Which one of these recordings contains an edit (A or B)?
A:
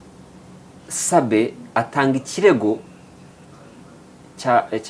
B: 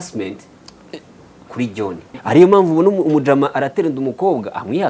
B